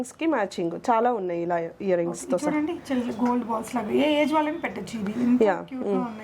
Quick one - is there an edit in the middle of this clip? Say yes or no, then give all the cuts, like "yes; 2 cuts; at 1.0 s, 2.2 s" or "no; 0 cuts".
no; 0 cuts